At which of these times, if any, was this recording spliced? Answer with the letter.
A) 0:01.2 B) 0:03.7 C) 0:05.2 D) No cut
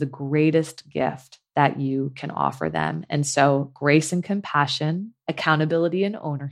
C